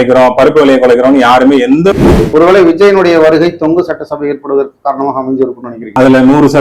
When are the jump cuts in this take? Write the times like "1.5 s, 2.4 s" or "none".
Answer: 1.9 s